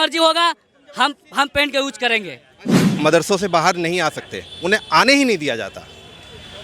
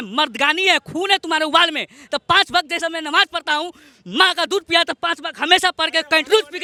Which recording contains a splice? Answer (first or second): first